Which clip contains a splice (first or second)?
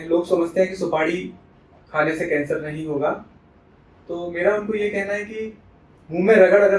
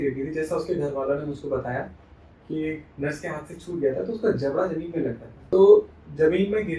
second